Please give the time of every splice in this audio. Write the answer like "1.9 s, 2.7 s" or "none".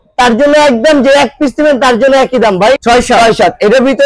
2.8 s